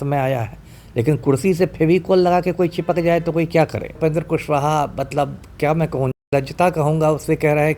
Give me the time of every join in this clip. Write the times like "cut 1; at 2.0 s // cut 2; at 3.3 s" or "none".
cut 1; at 4.0 s